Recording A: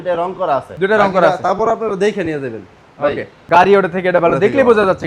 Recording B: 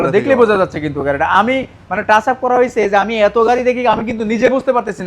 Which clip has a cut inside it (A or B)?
A